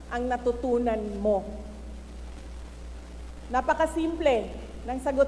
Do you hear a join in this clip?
no; 0 cuts

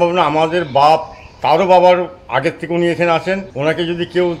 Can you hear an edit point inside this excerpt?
yes; 1 cut; at 3.5 s

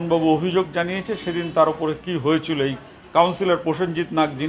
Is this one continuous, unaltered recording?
yes; 0 cuts

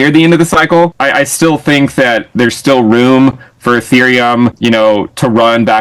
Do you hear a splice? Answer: yes; 2 cuts; at 1.0 s, 4.6 s

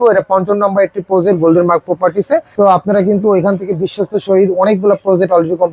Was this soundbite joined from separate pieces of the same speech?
yes; 1 cut; at 2.5 s

